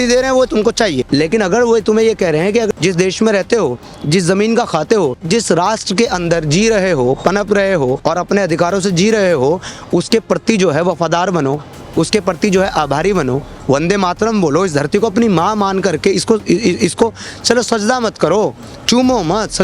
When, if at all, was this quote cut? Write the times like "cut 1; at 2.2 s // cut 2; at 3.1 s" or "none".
cut 1; at 1.0 s // cut 2; at 2.7 s // cut 3; at 5.2 s // cut 4; at 8.0 s